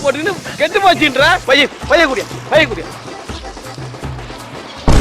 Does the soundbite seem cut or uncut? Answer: cut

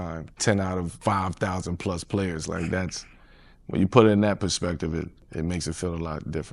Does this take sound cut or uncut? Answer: cut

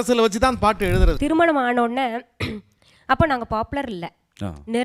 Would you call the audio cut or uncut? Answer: cut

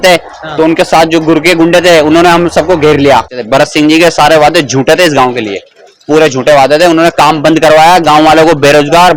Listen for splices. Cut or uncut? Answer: cut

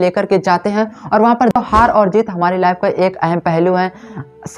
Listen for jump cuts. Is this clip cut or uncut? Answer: cut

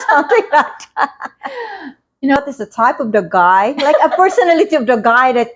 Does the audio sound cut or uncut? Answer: cut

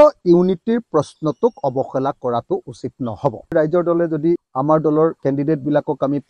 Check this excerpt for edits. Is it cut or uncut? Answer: cut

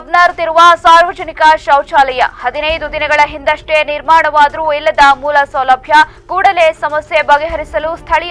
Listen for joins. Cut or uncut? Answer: uncut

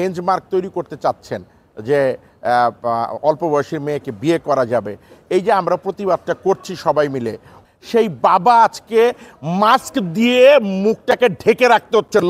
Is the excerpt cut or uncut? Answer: cut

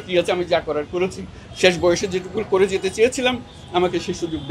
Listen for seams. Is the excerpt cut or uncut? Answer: uncut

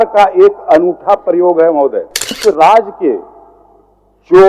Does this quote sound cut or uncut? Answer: cut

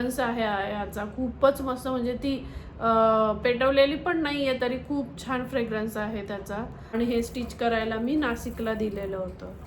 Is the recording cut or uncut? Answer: cut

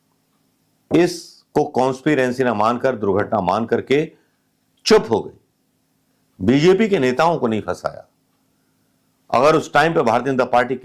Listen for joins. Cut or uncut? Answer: uncut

